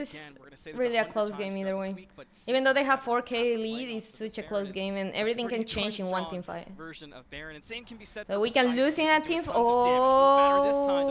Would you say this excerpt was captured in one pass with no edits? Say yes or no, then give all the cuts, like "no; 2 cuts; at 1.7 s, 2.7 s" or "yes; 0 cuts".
yes; 0 cuts